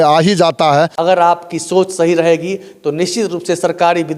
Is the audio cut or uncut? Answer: cut